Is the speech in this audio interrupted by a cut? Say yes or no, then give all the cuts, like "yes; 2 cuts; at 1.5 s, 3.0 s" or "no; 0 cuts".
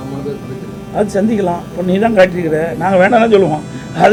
no; 0 cuts